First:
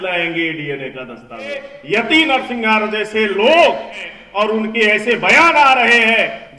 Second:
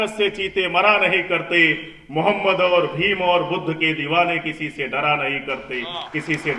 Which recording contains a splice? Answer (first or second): first